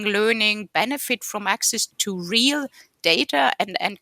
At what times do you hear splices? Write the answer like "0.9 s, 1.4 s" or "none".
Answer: 2.0 s